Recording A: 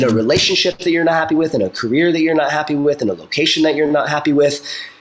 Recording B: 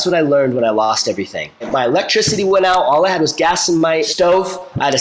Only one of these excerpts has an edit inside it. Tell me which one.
B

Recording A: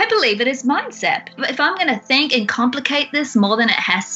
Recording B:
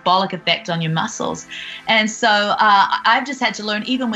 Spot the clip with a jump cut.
A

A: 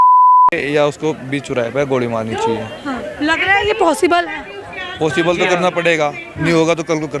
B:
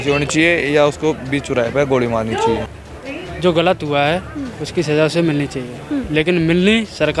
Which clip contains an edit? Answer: B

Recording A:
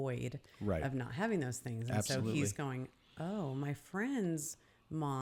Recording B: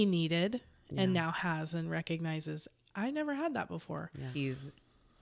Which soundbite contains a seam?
B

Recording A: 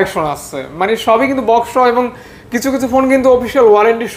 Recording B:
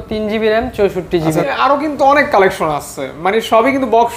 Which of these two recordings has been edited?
B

